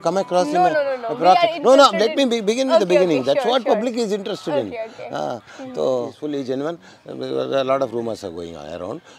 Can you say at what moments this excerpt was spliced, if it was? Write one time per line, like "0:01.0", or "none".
0:06.2